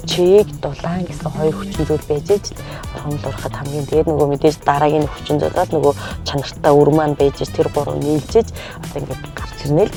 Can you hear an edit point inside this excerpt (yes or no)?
no